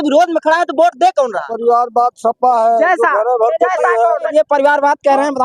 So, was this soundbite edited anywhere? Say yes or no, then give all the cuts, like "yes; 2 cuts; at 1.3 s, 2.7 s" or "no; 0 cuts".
yes; 2 cuts; at 1.4 s, 4.3 s